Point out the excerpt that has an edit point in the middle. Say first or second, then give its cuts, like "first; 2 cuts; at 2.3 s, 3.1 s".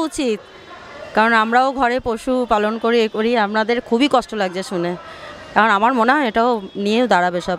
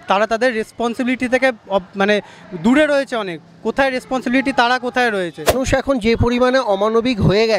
second; 1 cut; at 5.6 s